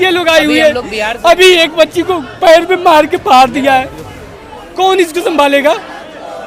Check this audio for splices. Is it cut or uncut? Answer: uncut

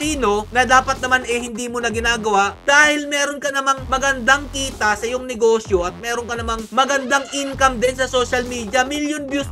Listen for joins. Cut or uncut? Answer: uncut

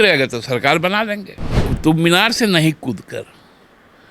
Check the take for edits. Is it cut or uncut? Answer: cut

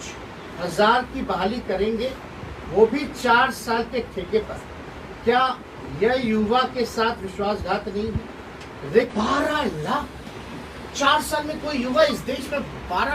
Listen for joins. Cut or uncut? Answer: cut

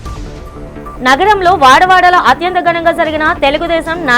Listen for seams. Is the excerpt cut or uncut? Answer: cut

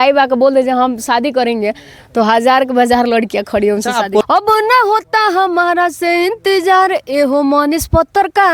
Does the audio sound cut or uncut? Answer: cut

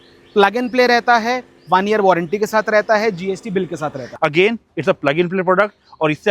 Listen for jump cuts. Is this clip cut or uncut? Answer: cut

